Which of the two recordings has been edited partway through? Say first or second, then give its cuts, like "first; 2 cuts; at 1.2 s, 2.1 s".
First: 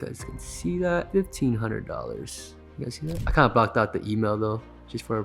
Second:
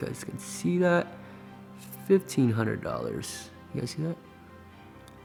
first; 2 cuts; at 1.1 s, 3.2 s